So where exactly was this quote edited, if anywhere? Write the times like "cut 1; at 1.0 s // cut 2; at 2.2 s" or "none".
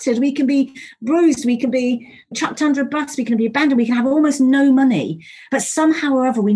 cut 1; at 2.4 s

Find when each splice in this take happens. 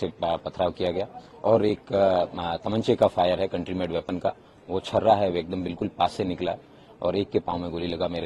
none

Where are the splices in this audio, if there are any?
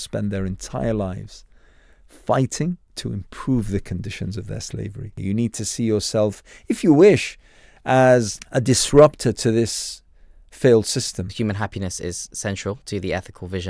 cut 1; at 2.9 s // cut 2; at 5.1 s // cut 3; at 8.4 s // cut 4; at 11.3 s

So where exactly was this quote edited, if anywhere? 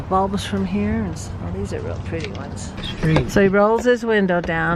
cut 1; at 2.8 s

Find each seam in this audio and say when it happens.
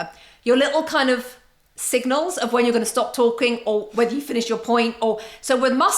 none

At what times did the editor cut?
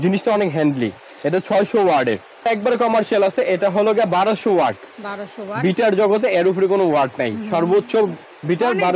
cut 1; at 2.5 s

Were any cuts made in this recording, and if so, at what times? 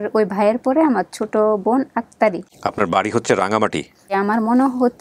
cut 1; at 2.4 s // cut 2; at 4.1 s

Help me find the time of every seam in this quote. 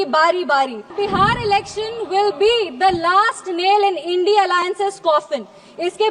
cut 1; at 0.9 s

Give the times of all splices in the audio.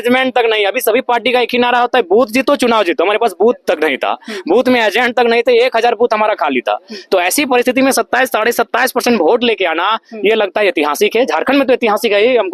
none

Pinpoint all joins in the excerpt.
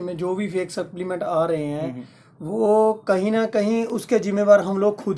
none

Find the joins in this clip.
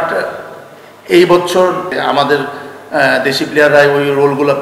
cut 1; at 2.0 s

